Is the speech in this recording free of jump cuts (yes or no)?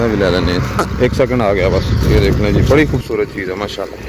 yes